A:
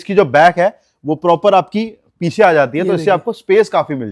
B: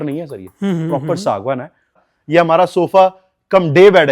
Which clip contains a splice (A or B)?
B